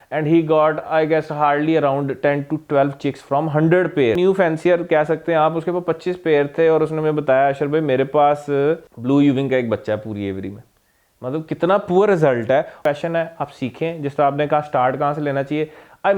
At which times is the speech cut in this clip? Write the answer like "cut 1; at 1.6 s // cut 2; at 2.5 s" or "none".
cut 1; at 4.2 s // cut 2; at 8.9 s // cut 3; at 12.8 s